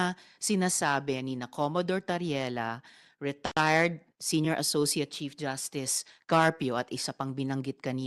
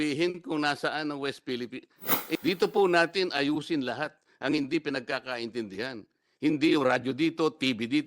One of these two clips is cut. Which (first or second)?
second